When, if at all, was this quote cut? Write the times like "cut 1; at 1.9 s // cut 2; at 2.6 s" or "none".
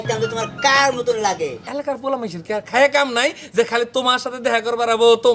cut 1; at 1.6 s